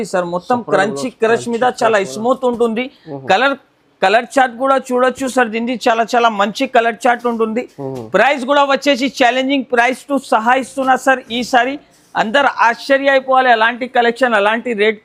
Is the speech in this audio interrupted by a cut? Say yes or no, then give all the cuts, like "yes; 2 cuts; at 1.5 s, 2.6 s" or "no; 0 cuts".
no; 0 cuts